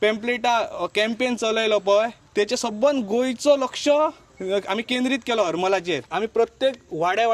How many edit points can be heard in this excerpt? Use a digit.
3